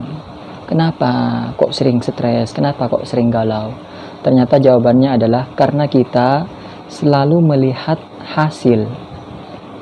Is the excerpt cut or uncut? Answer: uncut